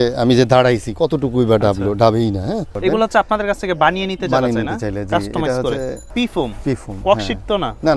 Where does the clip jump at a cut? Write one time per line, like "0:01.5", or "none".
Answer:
0:02.7
0:06.0